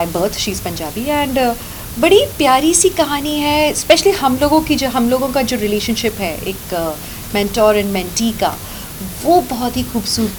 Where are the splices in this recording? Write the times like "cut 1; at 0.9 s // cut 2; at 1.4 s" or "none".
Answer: none